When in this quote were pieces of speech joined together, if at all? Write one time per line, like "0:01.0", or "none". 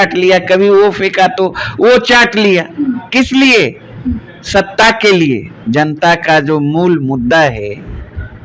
0:05.5